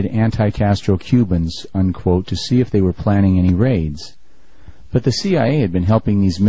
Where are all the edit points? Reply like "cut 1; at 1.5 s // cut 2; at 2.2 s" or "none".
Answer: cut 1; at 3.9 s